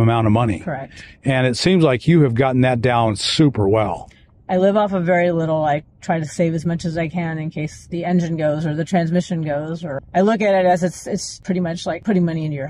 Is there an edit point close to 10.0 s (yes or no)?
yes